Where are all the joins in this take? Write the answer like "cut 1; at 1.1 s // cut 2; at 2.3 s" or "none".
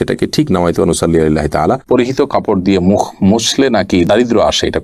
cut 1; at 1.8 s